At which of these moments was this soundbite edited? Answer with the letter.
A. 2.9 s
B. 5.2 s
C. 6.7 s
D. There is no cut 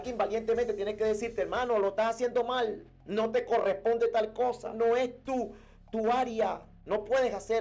C